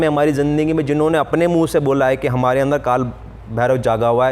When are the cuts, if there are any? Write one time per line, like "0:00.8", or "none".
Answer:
none